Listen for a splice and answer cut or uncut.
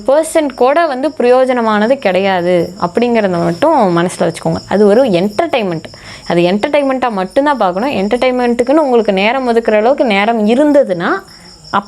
uncut